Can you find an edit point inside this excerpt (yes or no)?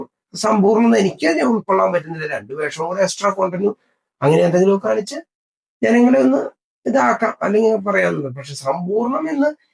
no